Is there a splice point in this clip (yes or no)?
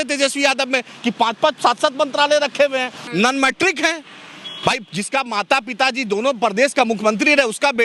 yes